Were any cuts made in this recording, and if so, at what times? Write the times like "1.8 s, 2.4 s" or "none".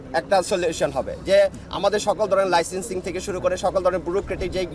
none